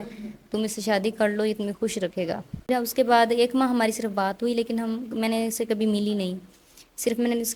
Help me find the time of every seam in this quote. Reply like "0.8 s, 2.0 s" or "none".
2.7 s

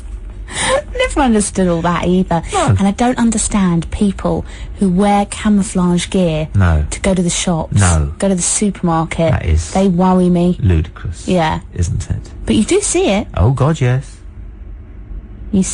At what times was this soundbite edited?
1.1 s

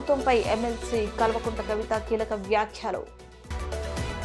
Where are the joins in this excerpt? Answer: none

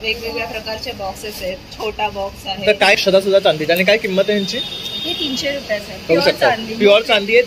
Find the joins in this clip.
3.0 s

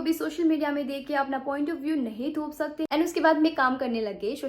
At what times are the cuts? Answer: 2.9 s

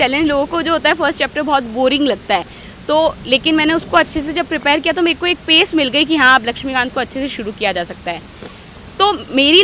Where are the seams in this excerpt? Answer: none

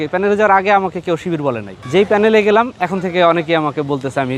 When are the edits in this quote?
none

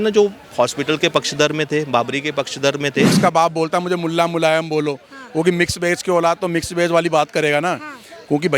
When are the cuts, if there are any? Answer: 3.2 s

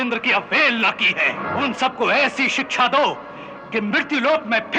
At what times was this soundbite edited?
1.4 s

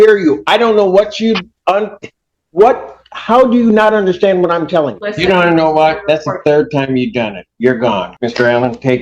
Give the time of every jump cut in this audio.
5.0 s, 8.1 s

